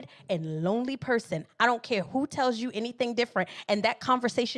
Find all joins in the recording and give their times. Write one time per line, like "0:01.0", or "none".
none